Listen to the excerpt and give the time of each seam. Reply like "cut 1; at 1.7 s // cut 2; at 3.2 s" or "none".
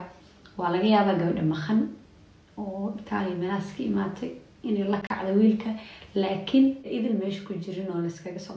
cut 1; at 6.8 s